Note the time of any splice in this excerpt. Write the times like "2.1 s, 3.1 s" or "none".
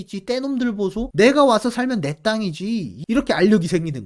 2.9 s

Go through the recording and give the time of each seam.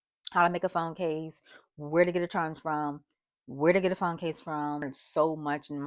5.0 s

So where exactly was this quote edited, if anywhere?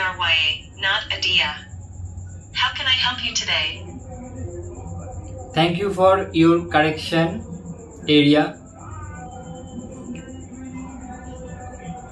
4.5 s

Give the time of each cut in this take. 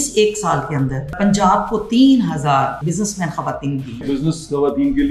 1.1 s, 2.8 s, 4.0 s

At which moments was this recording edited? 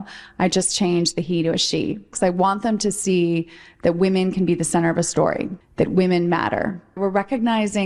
none

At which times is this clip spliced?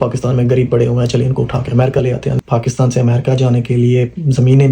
2.4 s

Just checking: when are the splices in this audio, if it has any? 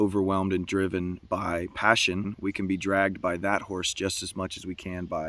2.3 s

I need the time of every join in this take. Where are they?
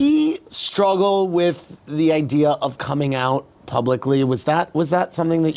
none

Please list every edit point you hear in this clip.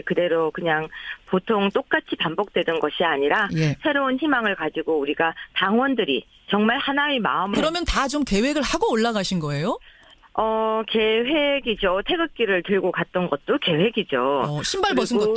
none

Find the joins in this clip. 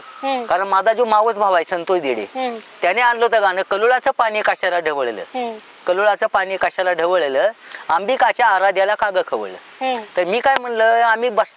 none

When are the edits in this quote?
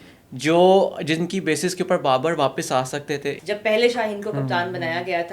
3.4 s

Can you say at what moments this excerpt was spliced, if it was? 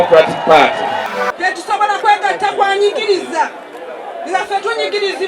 1.1 s

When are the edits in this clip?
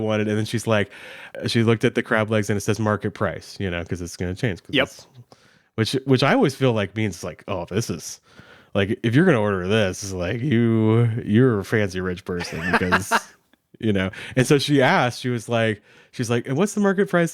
1.2 s

